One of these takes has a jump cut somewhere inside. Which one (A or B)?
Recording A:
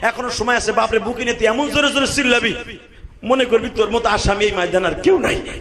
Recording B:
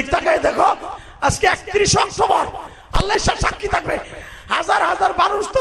B